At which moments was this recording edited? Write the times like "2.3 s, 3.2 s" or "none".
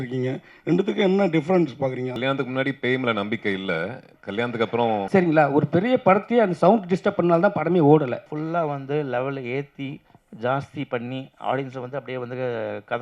2.2 s, 5.1 s, 8.3 s